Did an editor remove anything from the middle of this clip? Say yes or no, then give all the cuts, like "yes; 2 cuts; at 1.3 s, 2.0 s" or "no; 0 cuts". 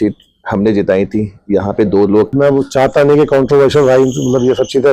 yes; 1 cut; at 2.3 s